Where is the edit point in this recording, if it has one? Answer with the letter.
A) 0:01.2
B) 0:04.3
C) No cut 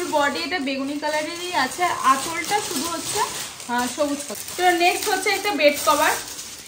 B